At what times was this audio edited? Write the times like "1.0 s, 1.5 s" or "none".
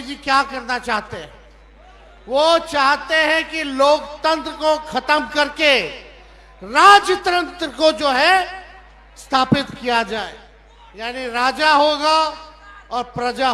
none